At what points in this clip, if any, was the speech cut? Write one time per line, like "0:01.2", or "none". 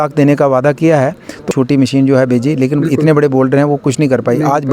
0:01.5